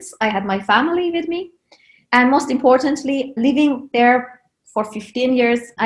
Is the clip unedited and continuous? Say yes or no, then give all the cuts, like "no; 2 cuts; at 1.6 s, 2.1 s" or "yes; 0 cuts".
yes; 0 cuts